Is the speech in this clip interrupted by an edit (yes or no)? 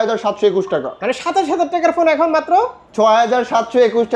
no